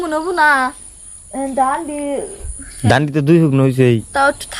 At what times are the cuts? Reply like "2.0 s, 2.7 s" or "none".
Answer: none